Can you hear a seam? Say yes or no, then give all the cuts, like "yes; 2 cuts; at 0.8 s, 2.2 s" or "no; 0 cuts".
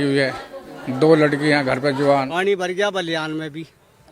yes; 1 cut; at 2.3 s